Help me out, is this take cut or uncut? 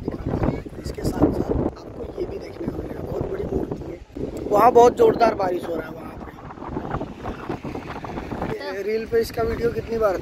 uncut